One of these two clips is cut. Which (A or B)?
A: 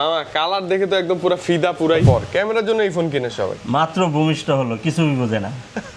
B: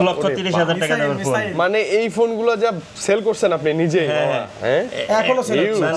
A